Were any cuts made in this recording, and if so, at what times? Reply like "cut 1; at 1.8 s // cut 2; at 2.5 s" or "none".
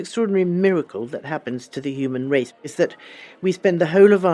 cut 1; at 2.6 s